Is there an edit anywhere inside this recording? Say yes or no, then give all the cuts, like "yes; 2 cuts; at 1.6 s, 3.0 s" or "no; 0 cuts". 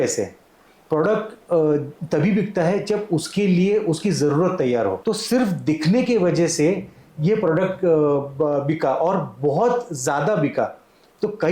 yes; 1 cut; at 5.0 s